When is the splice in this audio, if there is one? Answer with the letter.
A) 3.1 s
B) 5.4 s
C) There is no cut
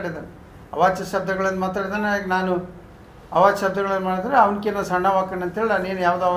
C